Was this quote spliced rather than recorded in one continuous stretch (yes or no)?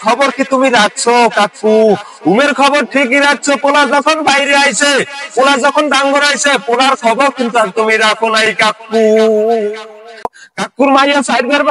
yes